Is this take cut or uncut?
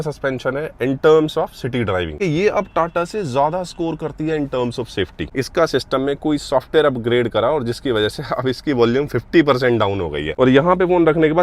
cut